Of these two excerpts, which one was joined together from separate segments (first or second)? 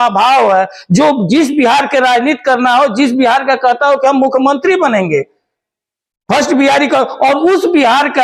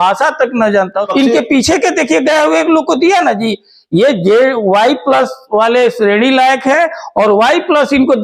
second